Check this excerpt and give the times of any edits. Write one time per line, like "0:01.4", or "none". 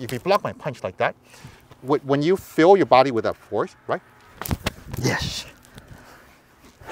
none

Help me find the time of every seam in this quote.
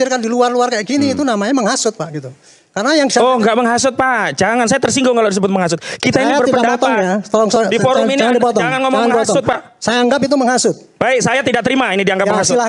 none

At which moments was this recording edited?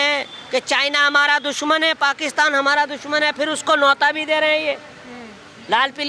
none

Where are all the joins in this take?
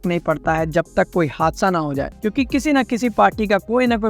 0:02.1

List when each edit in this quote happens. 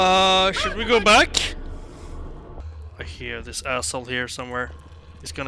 0:02.6

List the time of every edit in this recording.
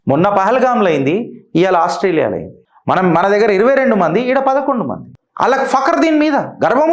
none

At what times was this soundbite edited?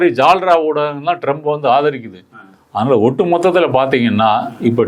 none

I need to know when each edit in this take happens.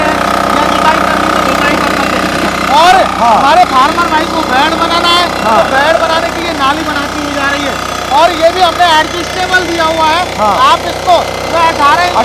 none

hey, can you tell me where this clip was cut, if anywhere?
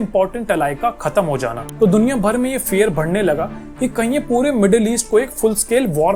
0:01.6

